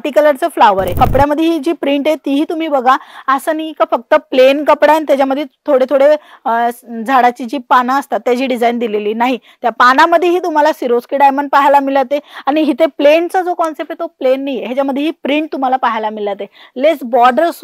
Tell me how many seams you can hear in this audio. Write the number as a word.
one